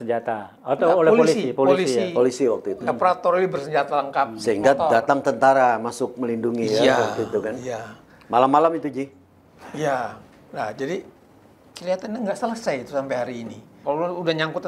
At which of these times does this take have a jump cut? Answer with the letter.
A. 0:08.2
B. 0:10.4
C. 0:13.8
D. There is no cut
C